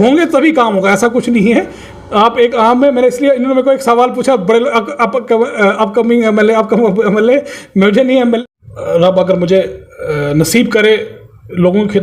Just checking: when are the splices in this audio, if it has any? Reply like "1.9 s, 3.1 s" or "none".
8.4 s

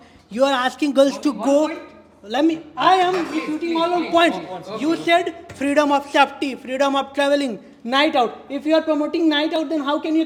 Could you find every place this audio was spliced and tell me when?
none

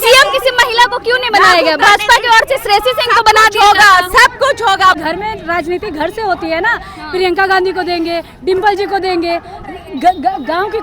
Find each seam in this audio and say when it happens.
5.0 s

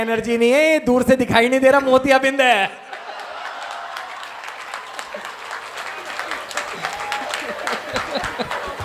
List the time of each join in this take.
none

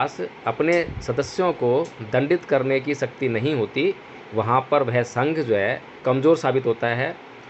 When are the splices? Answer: 6.0 s

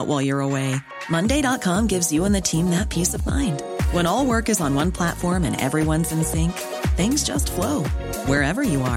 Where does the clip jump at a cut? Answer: none

